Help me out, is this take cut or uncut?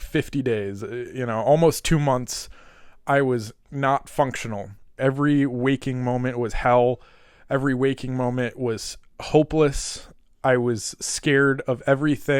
cut